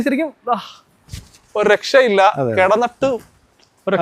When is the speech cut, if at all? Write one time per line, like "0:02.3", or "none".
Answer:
none